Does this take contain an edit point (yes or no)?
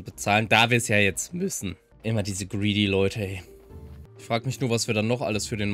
no